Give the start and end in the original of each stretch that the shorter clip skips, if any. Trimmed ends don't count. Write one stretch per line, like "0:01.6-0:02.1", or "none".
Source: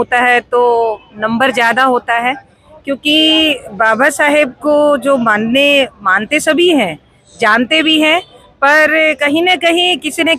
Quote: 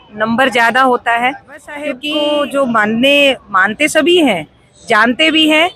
0:03.0-0:04.5